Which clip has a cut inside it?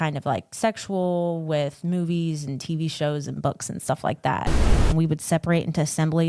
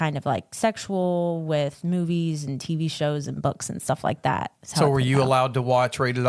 first; 1 cut; at 4.7 s

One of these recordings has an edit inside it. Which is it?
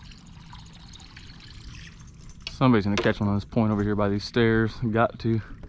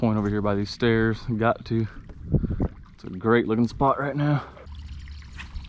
second; 1 cut; at 4.6 s

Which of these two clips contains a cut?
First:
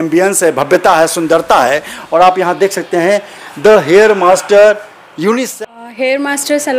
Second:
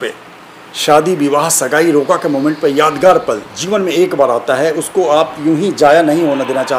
first; 1 cut; at 5.5 s

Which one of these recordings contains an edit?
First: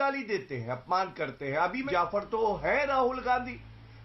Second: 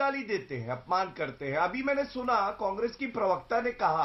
first; 1 cut; at 1.9 s

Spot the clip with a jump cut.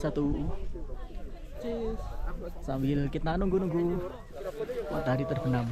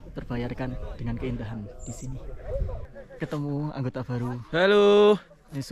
second; 1 cut; at 3.0 s

